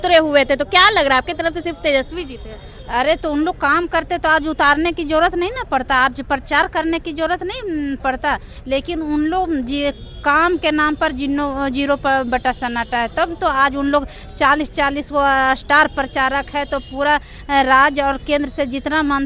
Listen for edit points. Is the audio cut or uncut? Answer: uncut